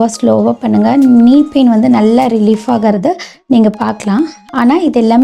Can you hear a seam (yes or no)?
no